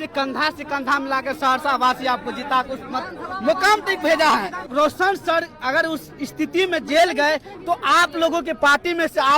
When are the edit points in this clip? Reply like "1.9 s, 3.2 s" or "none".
4.7 s